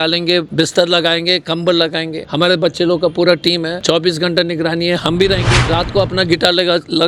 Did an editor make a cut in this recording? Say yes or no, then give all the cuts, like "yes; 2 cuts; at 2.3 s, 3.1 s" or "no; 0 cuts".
no; 0 cuts